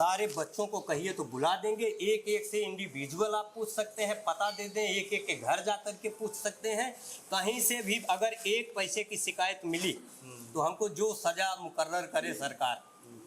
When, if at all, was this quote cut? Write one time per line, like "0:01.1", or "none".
none